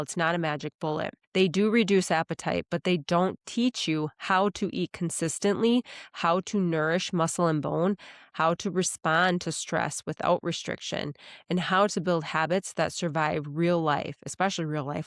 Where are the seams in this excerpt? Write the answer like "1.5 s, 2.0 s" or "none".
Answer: 1.2 s